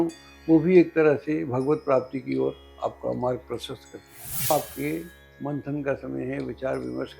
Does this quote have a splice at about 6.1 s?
no; 1 cut; at 4.5 s

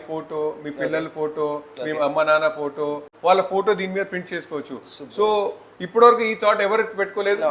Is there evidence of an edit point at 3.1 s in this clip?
yes; 1 cut; at 3.1 s

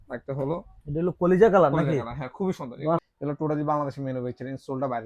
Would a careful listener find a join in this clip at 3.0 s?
yes; 1 cut; at 3.0 s

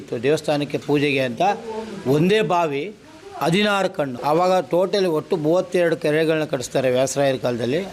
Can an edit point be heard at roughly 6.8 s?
no; 1 cut; at 4.1 s

